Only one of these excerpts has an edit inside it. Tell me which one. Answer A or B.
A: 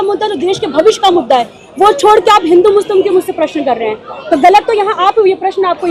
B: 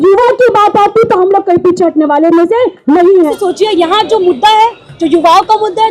B